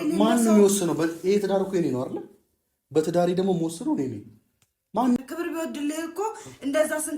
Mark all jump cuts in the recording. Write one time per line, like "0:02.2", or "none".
0:05.2